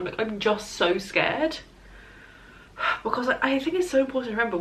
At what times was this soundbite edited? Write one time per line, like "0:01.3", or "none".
none